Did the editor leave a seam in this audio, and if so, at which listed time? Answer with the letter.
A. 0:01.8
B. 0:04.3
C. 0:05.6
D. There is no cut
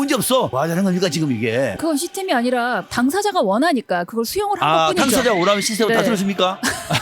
A